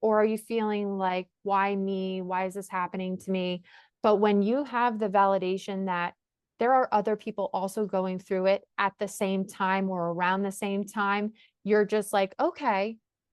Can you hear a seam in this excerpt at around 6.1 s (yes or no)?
no